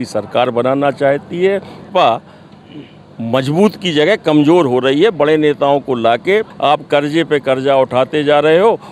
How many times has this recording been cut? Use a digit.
2